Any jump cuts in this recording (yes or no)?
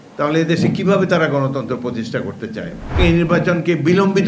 yes